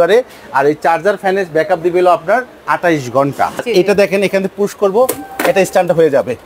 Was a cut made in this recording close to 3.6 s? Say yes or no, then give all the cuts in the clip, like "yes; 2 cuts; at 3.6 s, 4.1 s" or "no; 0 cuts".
yes; 1 cut; at 3.6 s